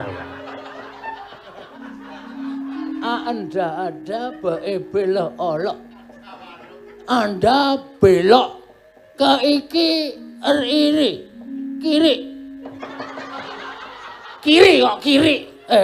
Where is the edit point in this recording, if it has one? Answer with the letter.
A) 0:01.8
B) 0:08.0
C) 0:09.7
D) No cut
A